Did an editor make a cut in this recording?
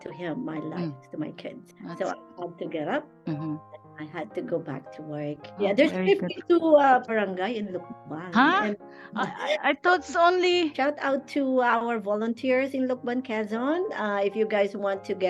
yes; 2 cuts; at 5.5 s, 10.7 s

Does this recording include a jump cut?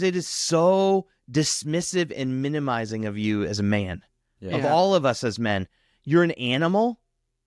no; 0 cuts

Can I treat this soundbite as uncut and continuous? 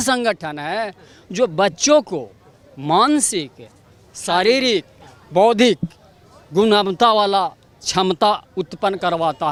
yes; 0 cuts

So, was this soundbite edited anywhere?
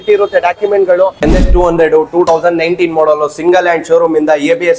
yes; 1 cut; at 1.1 s

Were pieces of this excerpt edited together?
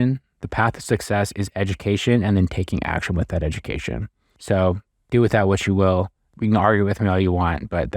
no; 0 cuts

